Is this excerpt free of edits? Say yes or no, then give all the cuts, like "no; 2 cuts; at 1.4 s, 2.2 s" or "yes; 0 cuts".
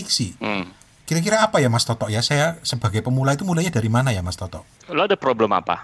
yes; 0 cuts